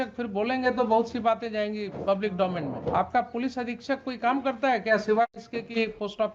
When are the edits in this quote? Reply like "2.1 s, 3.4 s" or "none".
1.9 s, 2.9 s